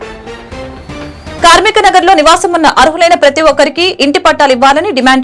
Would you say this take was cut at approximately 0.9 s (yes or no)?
yes